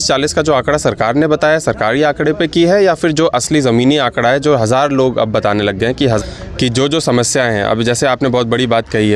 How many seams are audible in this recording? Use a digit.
1